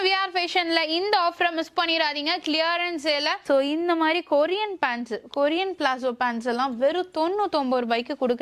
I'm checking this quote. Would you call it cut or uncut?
cut